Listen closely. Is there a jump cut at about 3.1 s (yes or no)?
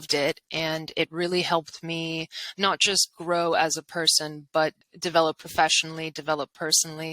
no